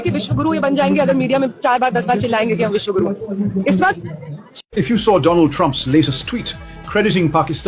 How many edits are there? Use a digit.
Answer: 1